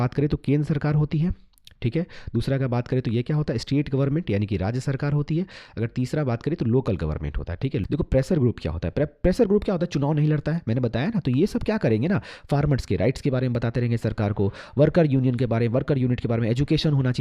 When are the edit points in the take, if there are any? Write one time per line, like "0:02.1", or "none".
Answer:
0:07.8